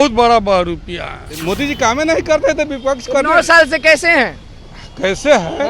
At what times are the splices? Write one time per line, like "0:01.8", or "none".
0:01.2